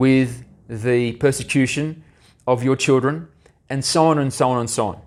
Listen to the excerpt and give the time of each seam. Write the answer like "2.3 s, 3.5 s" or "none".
none

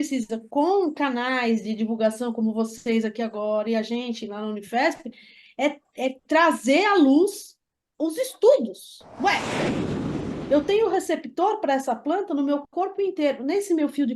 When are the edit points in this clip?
10.1 s

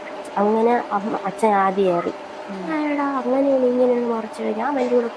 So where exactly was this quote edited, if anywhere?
2.7 s

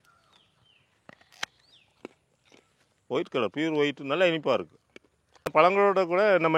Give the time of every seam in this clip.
5.5 s

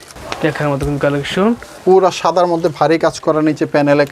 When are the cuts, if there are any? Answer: 1.7 s

